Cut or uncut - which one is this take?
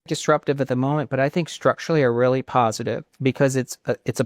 cut